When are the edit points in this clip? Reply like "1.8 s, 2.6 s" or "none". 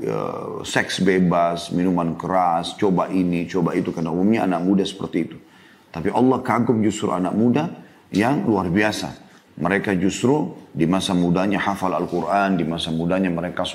none